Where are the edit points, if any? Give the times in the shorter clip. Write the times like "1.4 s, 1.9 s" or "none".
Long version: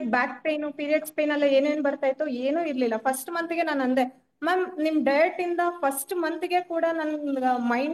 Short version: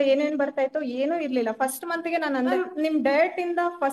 2.5 s